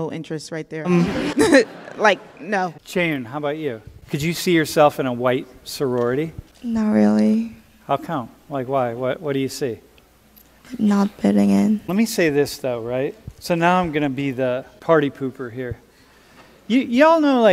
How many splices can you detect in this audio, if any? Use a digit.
6